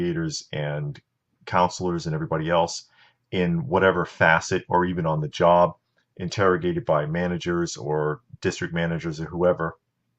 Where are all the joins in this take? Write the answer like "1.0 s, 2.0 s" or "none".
none